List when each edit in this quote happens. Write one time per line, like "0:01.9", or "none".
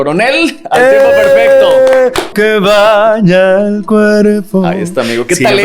0:02.3